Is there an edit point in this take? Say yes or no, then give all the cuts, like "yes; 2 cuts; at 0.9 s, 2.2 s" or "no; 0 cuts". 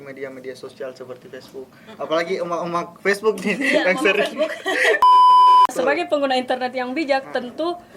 yes; 1 cut; at 5.7 s